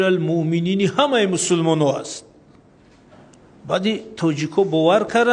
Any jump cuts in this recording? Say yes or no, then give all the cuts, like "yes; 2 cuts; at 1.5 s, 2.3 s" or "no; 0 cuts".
no; 0 cuts